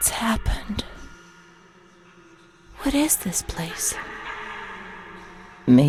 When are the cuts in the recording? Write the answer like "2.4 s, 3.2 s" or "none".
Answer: none